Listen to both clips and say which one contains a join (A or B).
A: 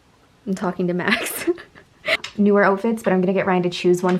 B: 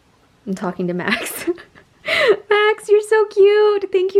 A